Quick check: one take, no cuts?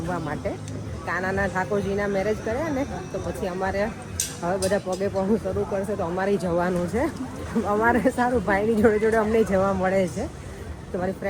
yes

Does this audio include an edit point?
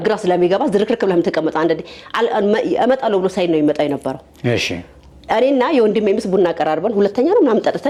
no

